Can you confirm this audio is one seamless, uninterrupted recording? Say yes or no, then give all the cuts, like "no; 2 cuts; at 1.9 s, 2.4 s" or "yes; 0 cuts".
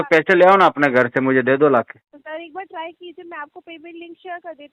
no; 1 cut; at 2.1 s